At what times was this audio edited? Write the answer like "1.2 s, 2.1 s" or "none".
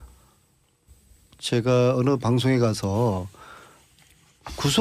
1.7 s